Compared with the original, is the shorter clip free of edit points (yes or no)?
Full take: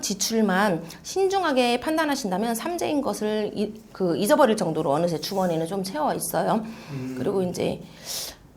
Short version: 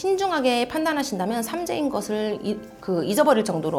yes